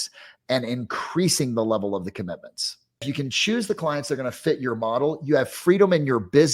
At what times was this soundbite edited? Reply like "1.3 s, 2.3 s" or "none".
3.0 s